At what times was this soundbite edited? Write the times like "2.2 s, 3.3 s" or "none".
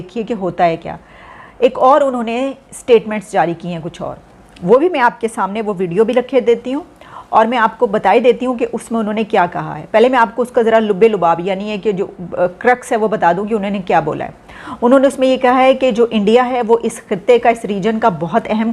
none